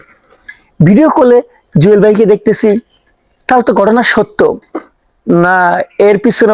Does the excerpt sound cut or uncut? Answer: uncut